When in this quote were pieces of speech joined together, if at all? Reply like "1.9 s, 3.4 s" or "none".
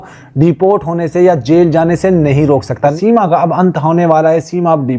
2.7 s

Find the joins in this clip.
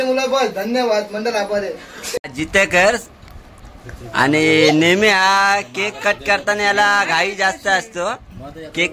2.3 s

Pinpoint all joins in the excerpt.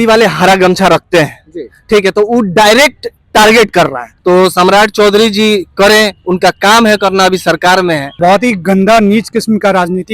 4.1 s, 8.2 s

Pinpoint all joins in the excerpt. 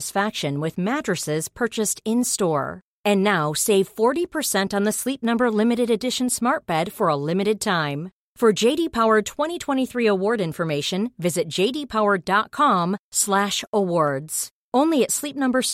none

